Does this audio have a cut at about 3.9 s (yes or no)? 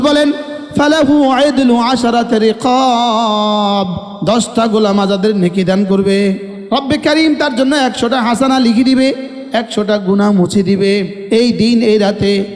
no